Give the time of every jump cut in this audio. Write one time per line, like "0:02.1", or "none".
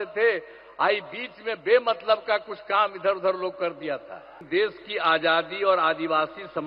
0:04.4